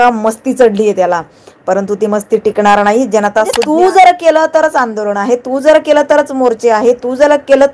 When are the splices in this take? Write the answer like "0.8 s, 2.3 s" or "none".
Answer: 3.6 s